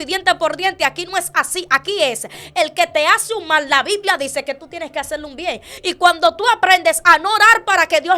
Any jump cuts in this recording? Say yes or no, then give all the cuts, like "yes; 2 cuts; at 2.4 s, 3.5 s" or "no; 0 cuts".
yes; 1 cut; at 5.7 s